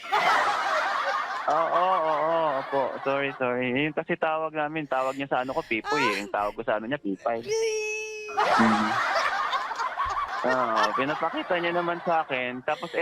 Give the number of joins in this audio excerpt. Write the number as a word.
one